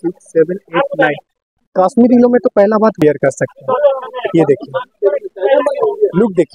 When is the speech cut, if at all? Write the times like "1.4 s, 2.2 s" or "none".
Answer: 3.0 s

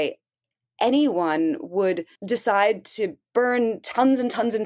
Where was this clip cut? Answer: 2.1 s

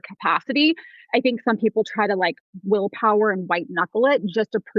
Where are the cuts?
1.0 s

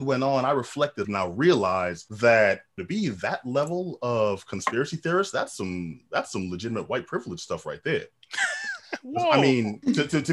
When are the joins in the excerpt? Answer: 1.1 s, 2.0 s, 2.8 s

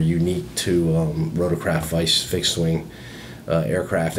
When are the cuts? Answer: none

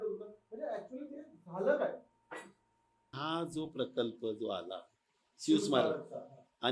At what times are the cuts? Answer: 3.2 s

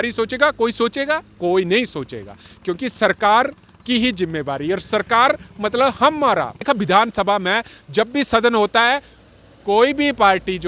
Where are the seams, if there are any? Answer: 6.6 s

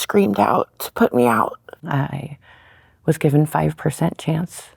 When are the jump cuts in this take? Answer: 1.7 s

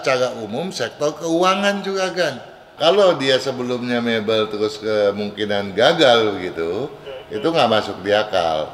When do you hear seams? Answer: 2.6 s

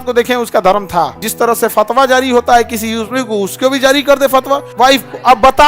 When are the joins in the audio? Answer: 1.2 s, 4.7 s

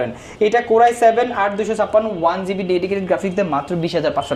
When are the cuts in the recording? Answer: none

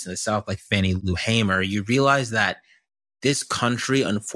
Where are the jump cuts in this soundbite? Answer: 1.0 s

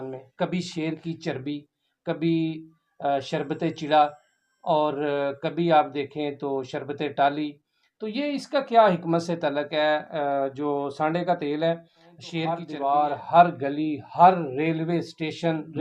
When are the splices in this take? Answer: 12.7 s

